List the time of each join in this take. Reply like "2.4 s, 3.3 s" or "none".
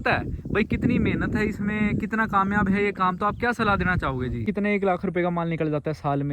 4.5 s